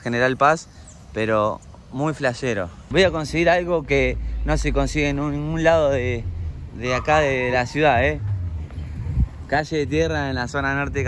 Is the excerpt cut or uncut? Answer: cut